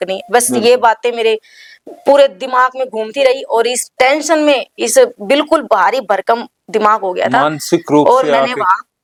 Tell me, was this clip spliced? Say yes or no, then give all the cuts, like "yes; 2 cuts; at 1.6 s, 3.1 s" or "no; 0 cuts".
no; 0 cuts